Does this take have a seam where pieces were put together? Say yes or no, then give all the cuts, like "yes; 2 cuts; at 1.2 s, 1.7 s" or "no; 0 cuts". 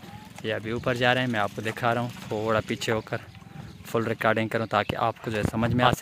no; 0 cuts